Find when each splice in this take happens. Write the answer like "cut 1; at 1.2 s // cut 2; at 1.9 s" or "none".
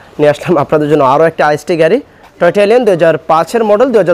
cut 1; at 2.2 s

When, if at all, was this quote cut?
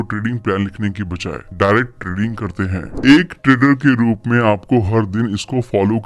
cut 1; at 2.8 s

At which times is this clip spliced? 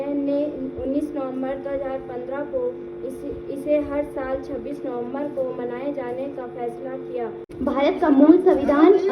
cut 1; at 7.5 s

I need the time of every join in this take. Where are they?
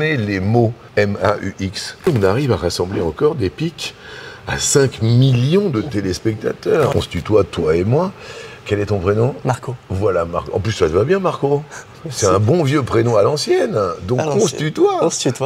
cut 1; at 0.8 s // cut 2; at 2.1 s // cut 3; at 6.9 s

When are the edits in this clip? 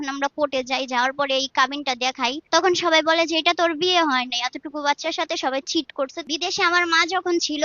cut 1; at 2.4 s // cut 2; at 6.2 s

